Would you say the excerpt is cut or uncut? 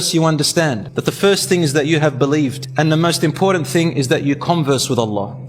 cut